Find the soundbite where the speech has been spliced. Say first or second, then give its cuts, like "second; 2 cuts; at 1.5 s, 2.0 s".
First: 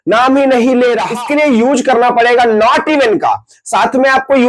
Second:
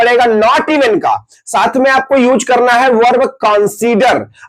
first; 1 cut; at 1.1 s